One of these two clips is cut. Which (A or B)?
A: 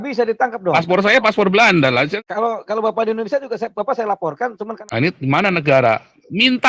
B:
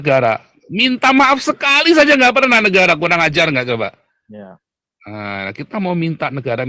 A